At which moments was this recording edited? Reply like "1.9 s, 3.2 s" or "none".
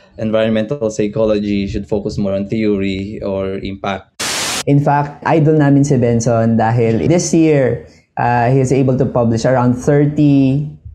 4.2 s